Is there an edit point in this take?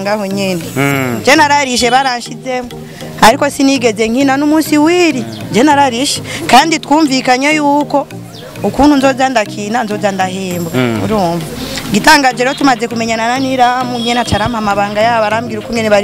no; 0 cuts

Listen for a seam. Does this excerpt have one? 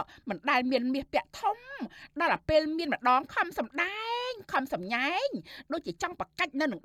no; 0 cuts

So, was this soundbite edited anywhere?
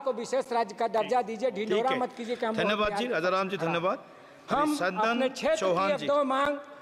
no; 0 cuts

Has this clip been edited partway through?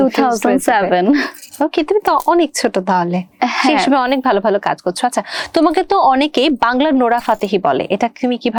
no; 0 cuts

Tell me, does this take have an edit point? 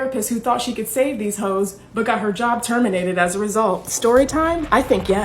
yes; 1 cut; at 4.3 s

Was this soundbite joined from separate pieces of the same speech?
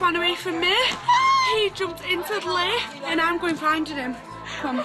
yes; 1 cut; at 3.1 s

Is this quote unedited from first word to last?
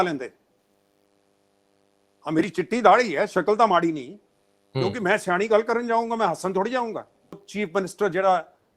no; 1 cut; at 7.5 s

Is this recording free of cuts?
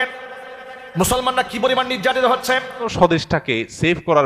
no; 1 cut; at 2.9 s

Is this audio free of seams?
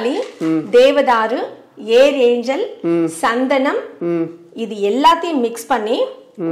yes; 0 cuts

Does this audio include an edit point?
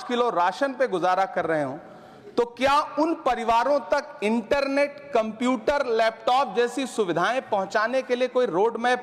no; 0 cuts

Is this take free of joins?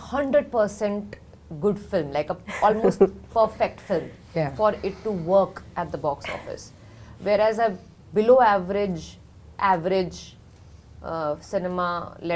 yes; 0 cuts

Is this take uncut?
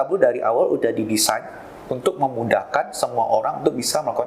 yes; 0 cuts

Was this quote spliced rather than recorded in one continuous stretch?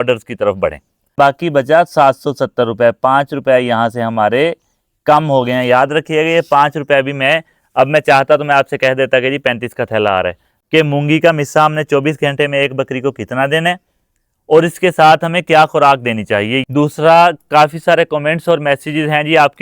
yes; 3 cuts; at 1.1 s, 10.5 s, 16.6 s

